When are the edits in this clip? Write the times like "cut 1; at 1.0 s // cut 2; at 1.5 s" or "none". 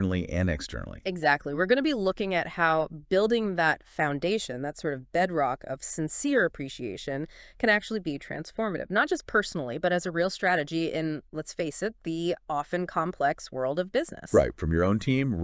none